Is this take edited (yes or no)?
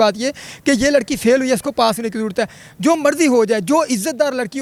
no